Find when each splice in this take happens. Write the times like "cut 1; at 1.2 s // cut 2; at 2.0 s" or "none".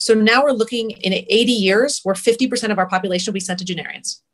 cut 1; at 1.0 s